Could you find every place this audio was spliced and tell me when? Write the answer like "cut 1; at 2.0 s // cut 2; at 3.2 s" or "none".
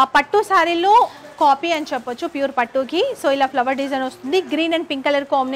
none

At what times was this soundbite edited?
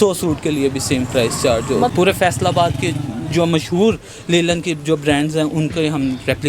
cut 1; at 1.9 s

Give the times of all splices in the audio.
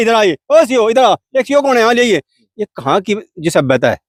none

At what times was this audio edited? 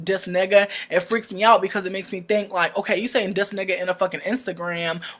cut 1; at 3.8 s

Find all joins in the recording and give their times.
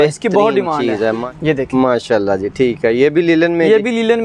cut 1; at 1.2 s

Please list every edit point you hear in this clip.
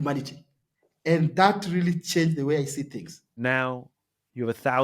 cut 1; at 1.0 s // cut 2; at 3.4 s

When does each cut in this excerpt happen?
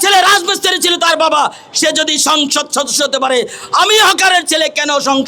none

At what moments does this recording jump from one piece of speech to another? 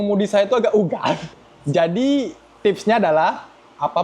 cut 1; at 1.3 s

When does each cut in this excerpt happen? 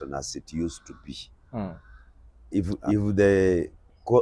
cut 1; at 2.7 s

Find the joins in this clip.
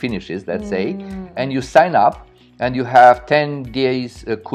none

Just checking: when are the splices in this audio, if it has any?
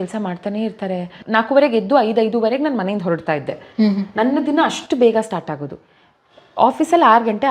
cut 1; at 1.0 s

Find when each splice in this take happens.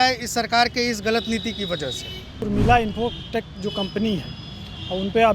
cut 1; at 2.4 s

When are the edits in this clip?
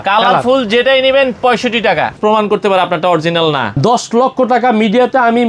cut 1; at 2.1 s // cut 2; at 3.8 s

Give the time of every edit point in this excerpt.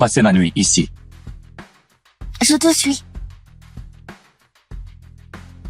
cut 1; at 0.9 s // cut 2; at 2.3 s // cut 3; at 3.0 s

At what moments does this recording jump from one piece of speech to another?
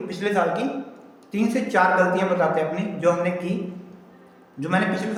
none

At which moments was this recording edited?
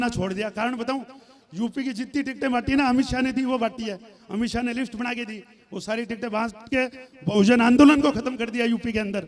none

